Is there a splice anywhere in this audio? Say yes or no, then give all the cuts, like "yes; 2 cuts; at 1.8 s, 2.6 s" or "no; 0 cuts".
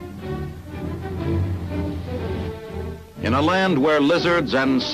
yes; 1 cut; at 1.2 s